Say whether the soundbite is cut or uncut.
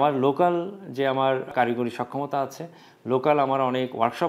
cut